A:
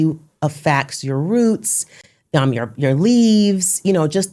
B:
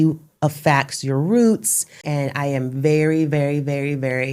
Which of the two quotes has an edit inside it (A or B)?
B